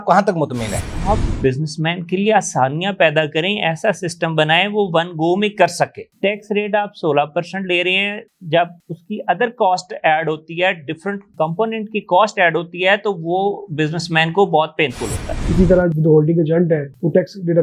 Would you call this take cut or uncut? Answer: cut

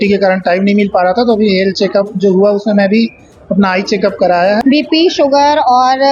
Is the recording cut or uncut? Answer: cut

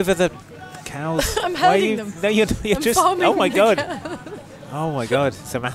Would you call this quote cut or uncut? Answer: uncut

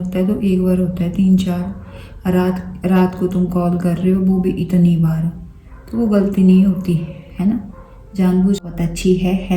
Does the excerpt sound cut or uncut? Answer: cut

